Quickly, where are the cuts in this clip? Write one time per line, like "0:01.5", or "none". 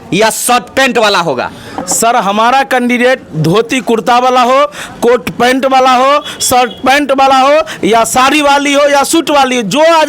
none